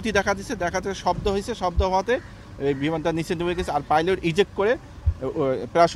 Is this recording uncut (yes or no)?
yes